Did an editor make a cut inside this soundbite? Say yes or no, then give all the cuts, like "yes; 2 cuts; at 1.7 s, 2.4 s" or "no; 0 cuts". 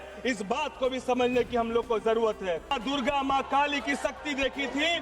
yes; 1 cut; at 2.7 s